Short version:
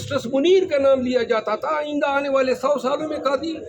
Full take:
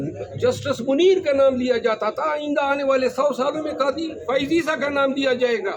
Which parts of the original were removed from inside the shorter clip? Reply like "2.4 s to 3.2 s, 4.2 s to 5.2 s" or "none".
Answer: none